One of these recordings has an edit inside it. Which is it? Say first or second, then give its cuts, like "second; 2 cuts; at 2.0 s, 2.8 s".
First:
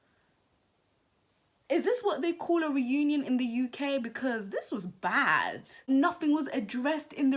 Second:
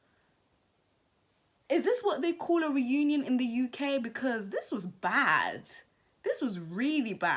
first; 1 cut; at 5.9 s